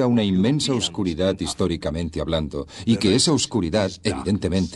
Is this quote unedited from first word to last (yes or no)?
yes